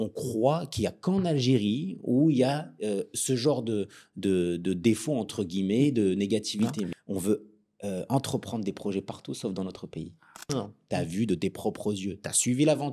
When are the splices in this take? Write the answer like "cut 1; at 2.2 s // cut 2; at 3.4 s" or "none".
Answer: cut 1; at 7.0 s // cut 2; at 10.5 s